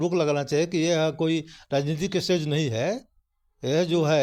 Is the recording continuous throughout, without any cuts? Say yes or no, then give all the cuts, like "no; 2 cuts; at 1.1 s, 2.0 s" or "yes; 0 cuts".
yes; 0 cuts